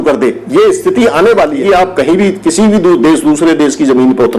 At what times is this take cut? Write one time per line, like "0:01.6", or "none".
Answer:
0:01.6